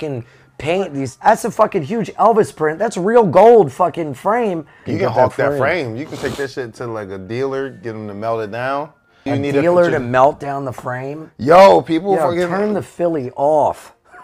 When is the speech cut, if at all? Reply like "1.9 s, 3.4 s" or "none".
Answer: 1.1 s, 4.8 s, 9.2 s